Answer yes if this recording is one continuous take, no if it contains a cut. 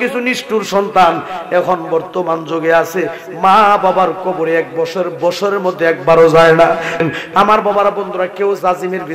no